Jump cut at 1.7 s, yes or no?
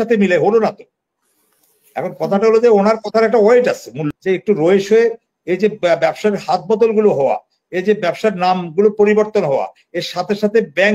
no